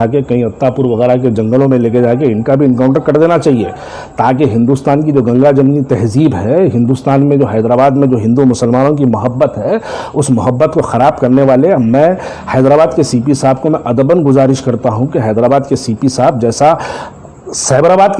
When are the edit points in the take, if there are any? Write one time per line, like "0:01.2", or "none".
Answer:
none